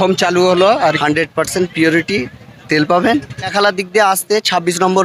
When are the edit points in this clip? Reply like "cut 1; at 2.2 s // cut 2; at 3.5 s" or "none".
cut 1; at 1.0 s // cut 2; at 3.5 s